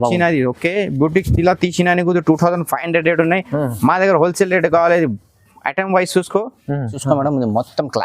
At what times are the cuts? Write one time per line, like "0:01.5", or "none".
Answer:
0:07.0